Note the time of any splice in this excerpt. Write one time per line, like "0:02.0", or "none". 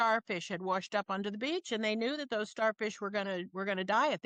none

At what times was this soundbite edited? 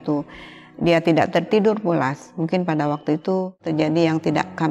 0:03.6

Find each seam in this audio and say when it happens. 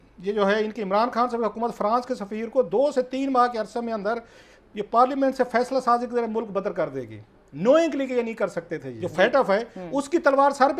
0:08.9

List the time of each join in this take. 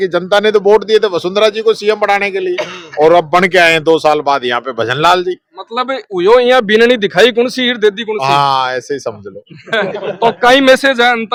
none

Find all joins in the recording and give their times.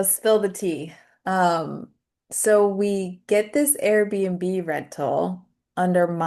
none

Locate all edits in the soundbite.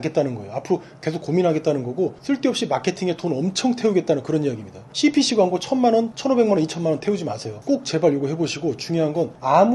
0:07.5

